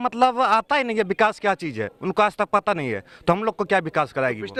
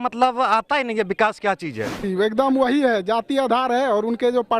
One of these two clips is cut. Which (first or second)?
second